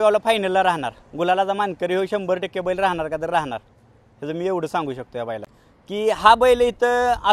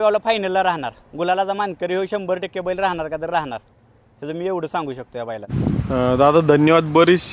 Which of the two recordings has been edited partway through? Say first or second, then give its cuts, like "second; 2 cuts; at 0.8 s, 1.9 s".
first; 1 cut; at 5.4 s